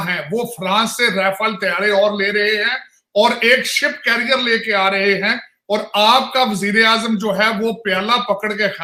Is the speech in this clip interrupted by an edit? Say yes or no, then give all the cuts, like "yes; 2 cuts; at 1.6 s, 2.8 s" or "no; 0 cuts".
no; 0 cuts